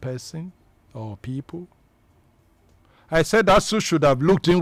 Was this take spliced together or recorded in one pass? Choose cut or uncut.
uncut